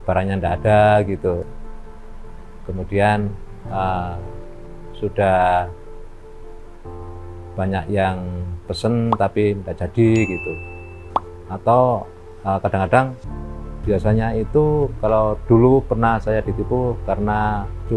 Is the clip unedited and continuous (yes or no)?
yes